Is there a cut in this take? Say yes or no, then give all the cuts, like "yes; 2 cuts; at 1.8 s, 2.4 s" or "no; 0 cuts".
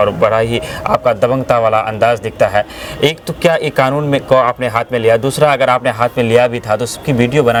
no; 0 cuts